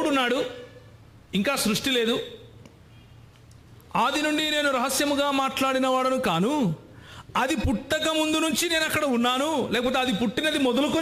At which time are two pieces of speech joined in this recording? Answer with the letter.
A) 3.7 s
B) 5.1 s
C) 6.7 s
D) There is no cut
D